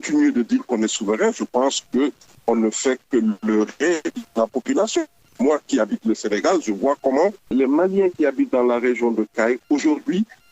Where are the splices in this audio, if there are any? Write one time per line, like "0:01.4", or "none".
0:05.3